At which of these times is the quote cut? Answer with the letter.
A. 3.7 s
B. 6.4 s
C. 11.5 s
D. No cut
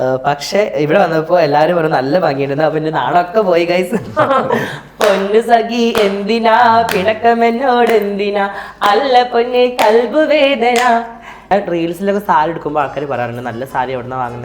C